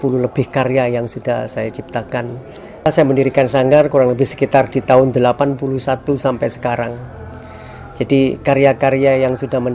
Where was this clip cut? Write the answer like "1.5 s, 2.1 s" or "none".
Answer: 2.9 s